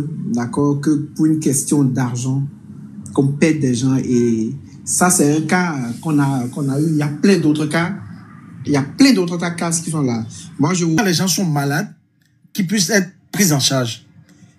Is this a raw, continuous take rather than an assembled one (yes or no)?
no